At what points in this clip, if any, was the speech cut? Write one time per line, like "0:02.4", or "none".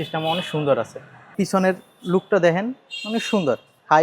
0:01.3